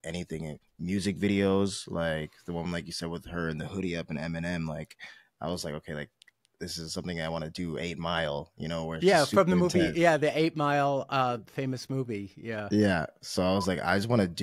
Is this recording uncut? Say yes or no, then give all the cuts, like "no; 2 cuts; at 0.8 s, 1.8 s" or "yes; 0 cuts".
yes; 0 cuts